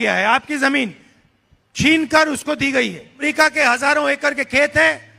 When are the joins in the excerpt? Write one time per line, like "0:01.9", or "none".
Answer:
0:03.2